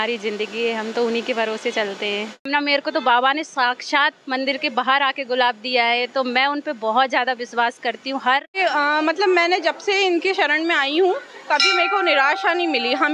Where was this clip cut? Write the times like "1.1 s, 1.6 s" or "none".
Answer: 2.5 s, 8.6 s